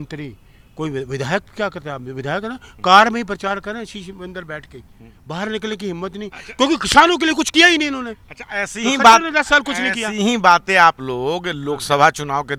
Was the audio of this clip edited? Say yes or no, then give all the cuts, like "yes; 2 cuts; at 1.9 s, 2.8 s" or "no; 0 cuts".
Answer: no; 0 cuts